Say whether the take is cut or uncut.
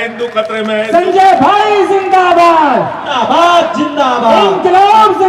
uncut